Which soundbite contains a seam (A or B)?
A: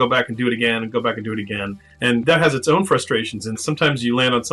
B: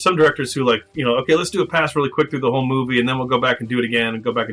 A